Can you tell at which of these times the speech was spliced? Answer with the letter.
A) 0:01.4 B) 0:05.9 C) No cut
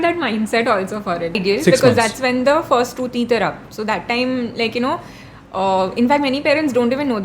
A